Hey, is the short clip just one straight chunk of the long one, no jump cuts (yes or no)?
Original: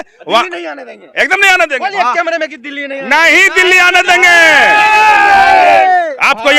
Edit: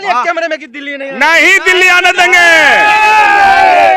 yes